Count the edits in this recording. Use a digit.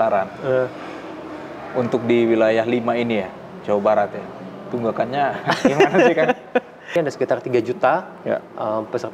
1